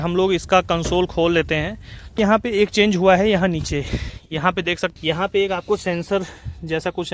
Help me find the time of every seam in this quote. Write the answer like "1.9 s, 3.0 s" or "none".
2.2 s, 4.9 s